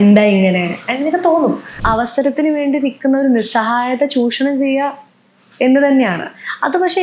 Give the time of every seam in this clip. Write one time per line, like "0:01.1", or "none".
0:01.8